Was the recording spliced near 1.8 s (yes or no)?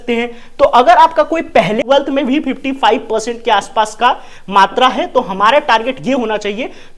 yes